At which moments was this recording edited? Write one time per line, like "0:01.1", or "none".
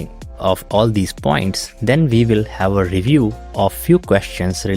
none